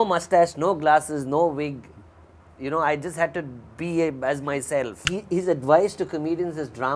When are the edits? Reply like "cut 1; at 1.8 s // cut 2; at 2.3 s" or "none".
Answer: cut 1; at 5.1 s